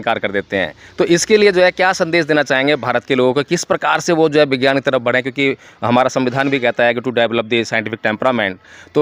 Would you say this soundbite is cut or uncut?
uncut